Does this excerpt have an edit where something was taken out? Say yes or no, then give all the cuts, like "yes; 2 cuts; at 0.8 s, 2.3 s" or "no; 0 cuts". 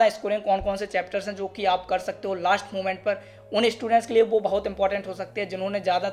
no; 0 cuts